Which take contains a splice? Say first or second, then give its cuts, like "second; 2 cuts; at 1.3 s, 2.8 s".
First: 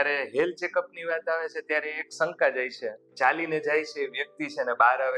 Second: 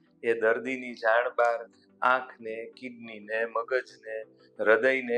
first; 1 cut; at 3.0 s